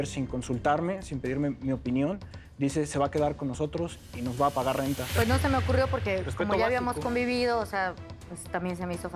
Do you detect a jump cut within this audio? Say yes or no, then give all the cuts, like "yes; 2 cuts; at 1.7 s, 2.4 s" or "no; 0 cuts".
yes; 1 cut; at 5.1 s